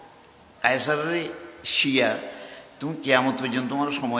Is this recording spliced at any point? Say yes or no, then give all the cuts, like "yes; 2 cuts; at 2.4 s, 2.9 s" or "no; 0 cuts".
no; 0 cuts